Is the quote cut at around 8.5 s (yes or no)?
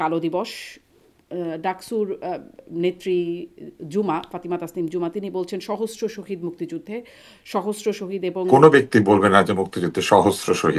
yes